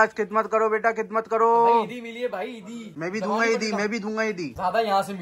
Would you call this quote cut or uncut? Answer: uncut